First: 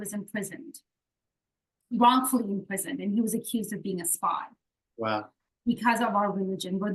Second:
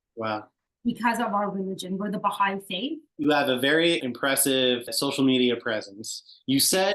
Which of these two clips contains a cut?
second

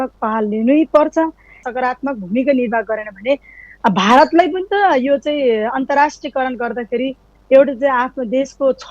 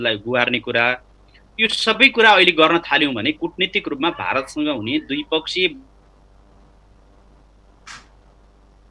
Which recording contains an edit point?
first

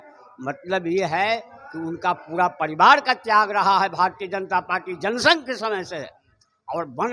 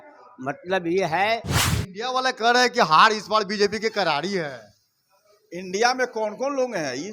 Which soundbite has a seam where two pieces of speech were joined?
second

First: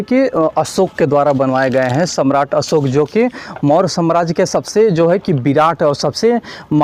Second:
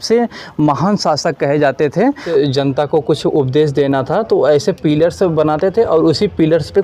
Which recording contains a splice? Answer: second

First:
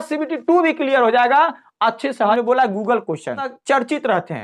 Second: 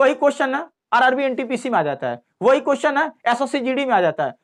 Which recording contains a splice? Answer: first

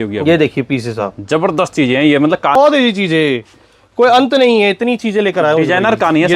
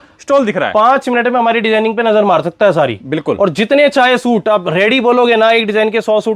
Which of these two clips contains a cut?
first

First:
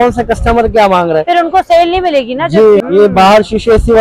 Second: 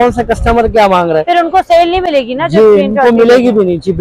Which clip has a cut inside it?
first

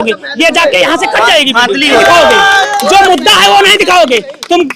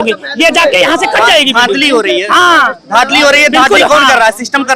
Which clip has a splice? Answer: first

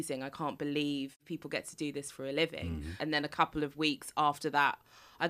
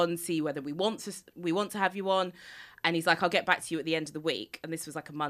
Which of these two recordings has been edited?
first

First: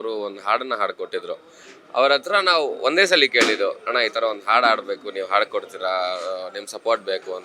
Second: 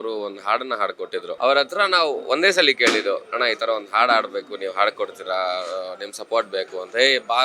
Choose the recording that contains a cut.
second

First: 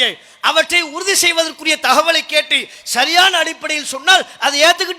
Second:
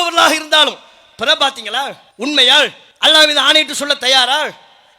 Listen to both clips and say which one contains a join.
second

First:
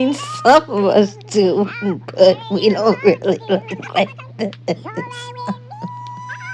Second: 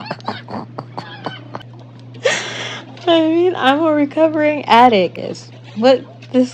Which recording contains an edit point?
second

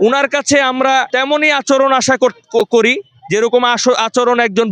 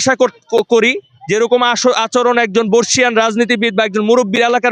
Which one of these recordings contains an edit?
first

